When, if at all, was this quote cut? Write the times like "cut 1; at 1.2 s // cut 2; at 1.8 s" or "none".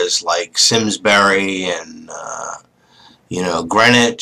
cut 1; at 3.1 s